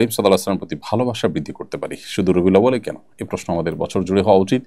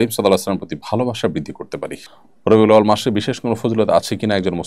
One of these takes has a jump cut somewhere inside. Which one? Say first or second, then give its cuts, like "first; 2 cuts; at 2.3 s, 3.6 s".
second; 1 cut; at 2.0 s